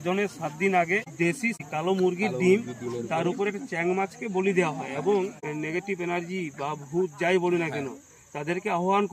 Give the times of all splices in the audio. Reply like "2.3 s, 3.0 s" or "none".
1.6 s, 5.3 s